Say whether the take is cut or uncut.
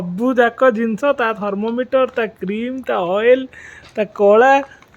uncut